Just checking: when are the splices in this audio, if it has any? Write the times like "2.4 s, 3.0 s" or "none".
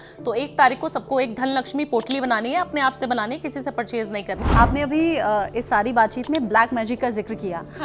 4.4 s